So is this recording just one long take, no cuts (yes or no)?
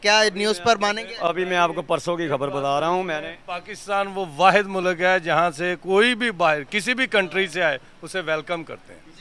yes